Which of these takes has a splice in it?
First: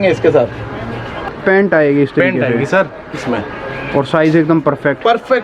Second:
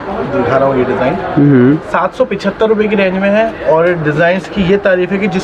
first; 1 cut; at 1.3 s

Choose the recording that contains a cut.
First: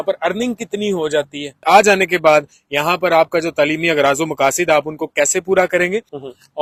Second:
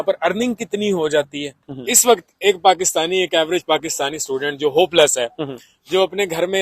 second; 1 cut; at 1.6 s

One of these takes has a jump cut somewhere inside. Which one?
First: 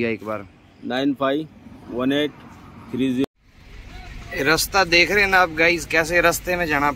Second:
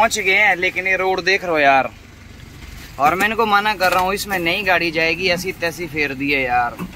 first; 1 cut; at 3.3 s

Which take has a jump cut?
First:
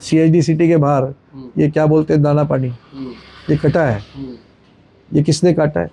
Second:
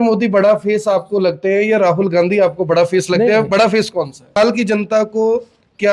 second; 1 cut; at 4.3 s

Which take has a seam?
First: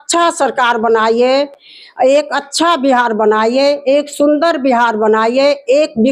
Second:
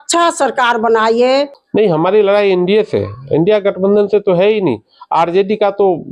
second; 1 cut; at 1.6 s

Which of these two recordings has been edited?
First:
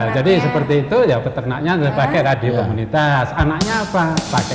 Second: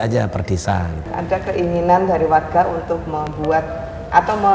second; 1 cut; at 1.0 s

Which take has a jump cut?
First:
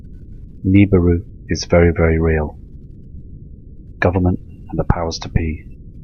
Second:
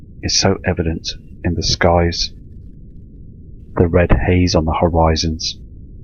first; 1 cut; at 2.3 s

